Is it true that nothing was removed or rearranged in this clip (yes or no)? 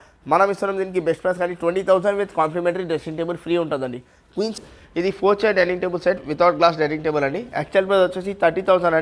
no